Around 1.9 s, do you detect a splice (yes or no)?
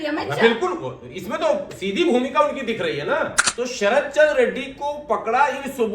no